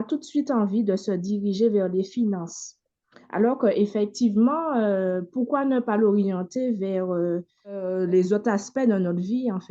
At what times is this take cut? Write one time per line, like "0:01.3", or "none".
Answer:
0:07.9